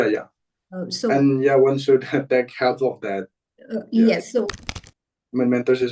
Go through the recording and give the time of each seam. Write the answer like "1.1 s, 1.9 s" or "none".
4.6 s